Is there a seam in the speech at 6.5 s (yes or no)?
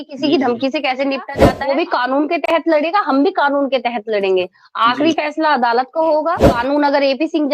yes